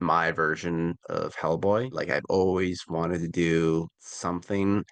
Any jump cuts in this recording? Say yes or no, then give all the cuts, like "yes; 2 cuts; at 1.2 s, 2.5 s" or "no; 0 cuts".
no; 0 cuts